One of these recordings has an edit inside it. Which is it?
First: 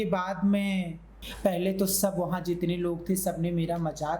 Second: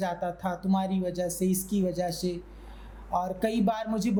first; 1 cut; at 1.2 s

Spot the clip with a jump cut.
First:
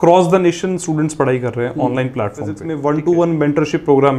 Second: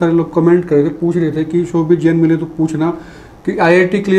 first; 1 cut; at 2.6 s

